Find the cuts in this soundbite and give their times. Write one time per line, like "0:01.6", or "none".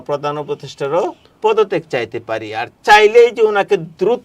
0:01.2